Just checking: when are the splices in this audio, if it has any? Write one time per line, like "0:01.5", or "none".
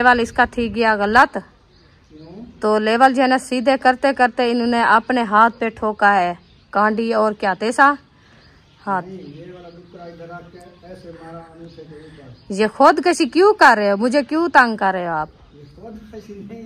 none